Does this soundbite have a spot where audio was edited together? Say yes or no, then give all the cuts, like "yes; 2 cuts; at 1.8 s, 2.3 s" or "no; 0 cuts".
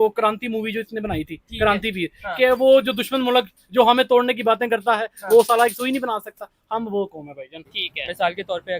yes; 1 cut; at 7.5 s